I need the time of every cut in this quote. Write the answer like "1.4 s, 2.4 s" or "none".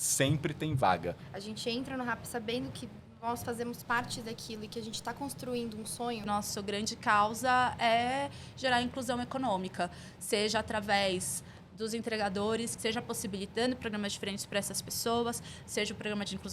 1.3 s, 6.2 s, 12.7 s

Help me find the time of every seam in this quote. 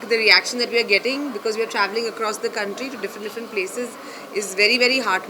none

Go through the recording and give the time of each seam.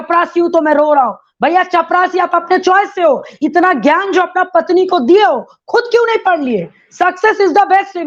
none

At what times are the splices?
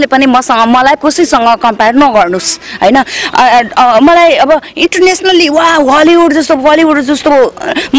none

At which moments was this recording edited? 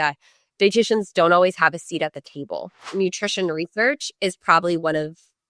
2.8 s

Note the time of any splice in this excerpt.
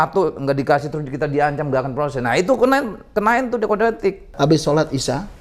4.3 s

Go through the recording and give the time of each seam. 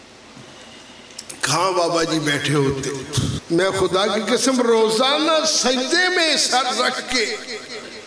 3.4 s

